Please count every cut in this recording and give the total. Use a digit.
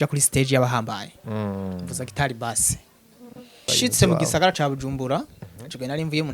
1